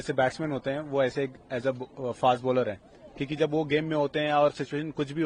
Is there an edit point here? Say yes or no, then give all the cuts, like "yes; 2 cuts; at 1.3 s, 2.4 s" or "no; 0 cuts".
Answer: no; 0 cuts